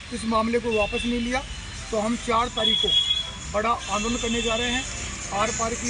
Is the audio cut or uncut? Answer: uncut